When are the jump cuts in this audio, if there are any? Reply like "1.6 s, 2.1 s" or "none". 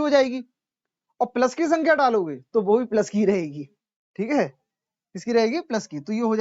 none